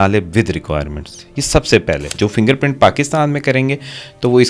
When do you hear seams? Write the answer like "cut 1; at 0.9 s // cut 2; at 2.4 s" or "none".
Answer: cut 1; at 2.1 s